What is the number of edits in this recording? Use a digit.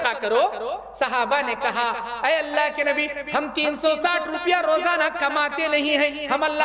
0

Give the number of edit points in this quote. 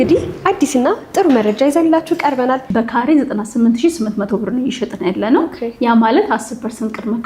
1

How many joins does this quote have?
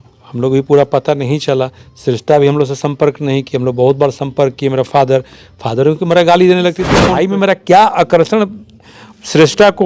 1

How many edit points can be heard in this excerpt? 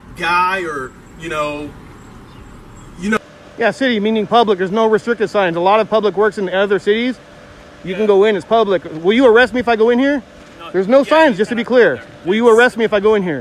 1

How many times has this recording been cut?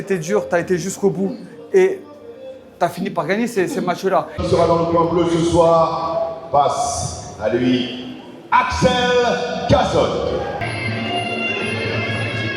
2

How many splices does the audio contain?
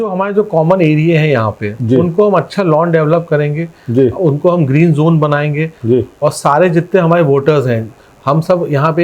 0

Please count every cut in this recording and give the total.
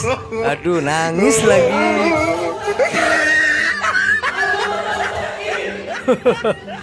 0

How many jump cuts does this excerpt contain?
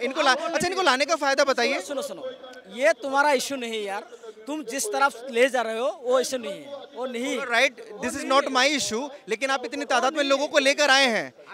0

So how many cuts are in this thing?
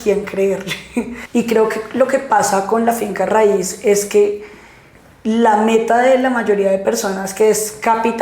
1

